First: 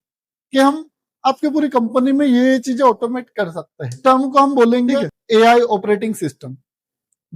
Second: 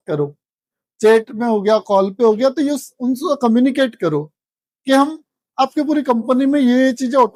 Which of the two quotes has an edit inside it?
first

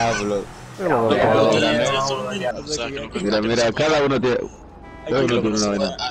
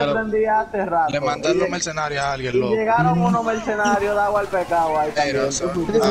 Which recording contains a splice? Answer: first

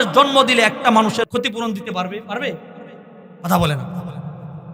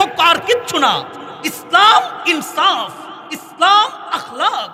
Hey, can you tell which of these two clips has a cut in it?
first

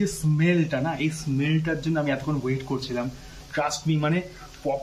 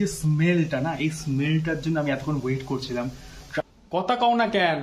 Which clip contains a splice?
second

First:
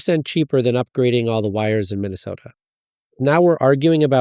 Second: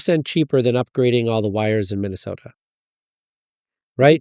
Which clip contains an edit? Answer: first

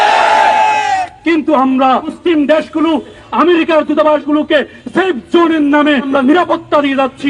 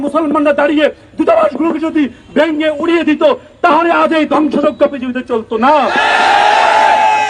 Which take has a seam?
first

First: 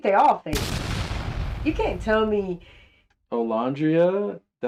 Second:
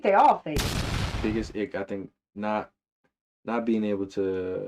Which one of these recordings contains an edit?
second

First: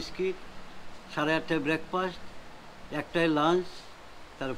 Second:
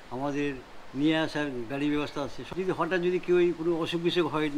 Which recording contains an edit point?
second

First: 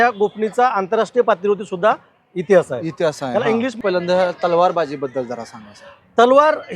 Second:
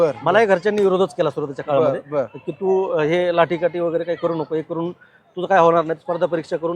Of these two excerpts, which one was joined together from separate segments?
first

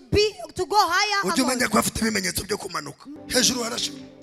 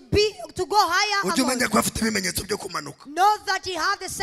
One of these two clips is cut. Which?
first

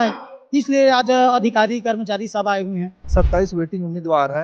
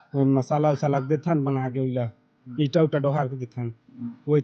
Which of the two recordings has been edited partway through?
first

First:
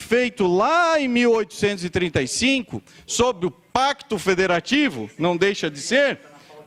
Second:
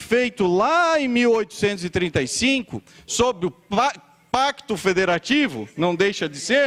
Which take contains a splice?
first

